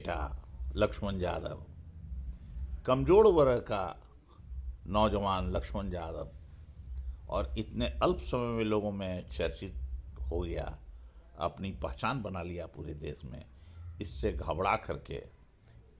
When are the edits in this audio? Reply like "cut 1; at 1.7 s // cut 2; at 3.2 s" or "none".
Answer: none